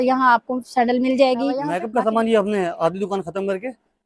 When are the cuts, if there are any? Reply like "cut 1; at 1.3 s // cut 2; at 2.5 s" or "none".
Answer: cut 1; at 1.8 s